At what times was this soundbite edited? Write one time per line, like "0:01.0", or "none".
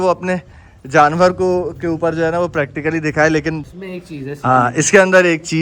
0:03.6